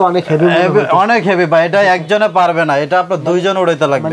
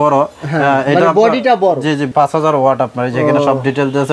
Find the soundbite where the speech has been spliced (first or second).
second